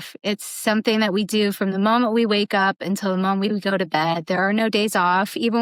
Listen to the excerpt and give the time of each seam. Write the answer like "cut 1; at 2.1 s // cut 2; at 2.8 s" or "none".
none